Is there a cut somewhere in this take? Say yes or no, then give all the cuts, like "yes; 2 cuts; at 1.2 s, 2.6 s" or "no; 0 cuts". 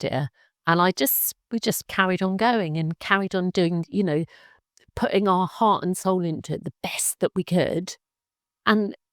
yes; 1 cut; at 1.9 s